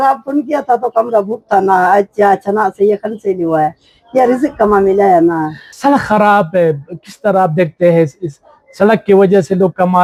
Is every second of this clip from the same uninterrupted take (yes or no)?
yes